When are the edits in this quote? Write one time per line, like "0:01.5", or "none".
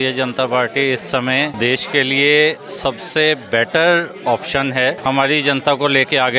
0:01.5
0:05.0